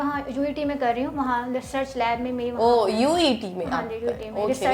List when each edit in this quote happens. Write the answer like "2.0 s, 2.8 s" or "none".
none